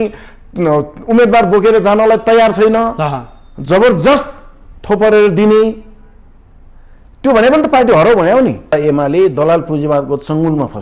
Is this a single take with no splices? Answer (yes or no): no